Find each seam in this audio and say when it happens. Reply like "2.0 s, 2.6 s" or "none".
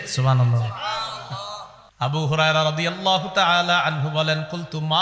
1.8 s